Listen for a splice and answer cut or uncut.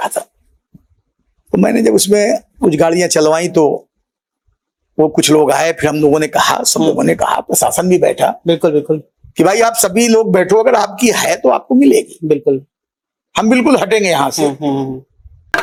uncut